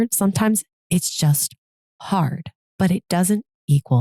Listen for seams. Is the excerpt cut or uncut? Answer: uncut